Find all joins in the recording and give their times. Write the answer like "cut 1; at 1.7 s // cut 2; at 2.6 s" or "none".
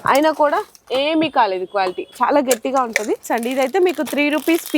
cut 1; at 3.3 s